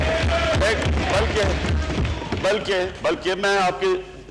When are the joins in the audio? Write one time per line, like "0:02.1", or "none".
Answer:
none